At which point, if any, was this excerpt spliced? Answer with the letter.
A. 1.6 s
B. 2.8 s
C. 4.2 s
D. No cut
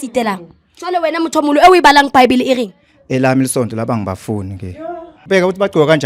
D